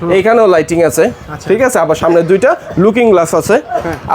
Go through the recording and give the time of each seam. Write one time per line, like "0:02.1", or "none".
none